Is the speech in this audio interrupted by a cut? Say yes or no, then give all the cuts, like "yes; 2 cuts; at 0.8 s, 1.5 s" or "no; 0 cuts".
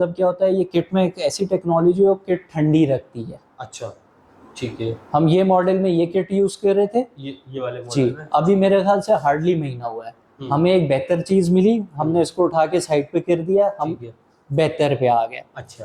no; 0 cuts